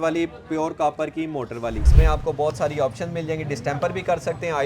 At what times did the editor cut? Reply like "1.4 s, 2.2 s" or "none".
1.8 s